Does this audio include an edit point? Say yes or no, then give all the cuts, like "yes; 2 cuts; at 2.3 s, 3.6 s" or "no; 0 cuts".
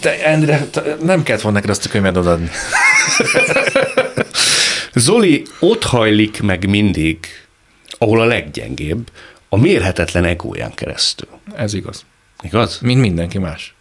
no; 0 cuts